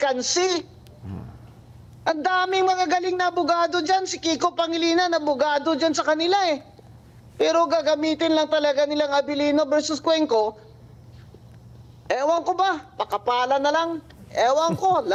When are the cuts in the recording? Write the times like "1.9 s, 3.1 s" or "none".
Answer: none